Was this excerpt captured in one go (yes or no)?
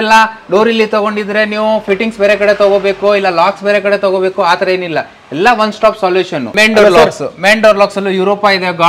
no